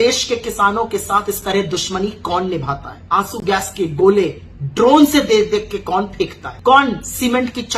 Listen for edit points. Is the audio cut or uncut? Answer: cut